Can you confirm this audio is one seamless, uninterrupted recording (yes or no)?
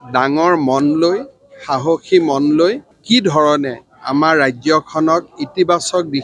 no